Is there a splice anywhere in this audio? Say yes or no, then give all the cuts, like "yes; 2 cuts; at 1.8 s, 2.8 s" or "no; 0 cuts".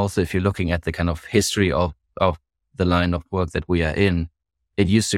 no; 0 cuts